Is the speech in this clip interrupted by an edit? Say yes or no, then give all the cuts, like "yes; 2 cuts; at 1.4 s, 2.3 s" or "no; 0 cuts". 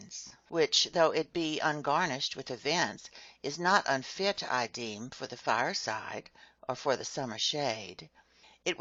no; 0 cuts